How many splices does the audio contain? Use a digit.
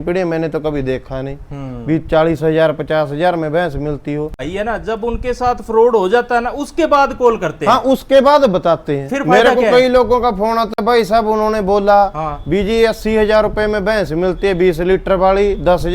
1